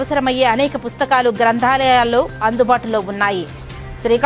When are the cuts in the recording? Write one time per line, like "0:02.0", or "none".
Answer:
none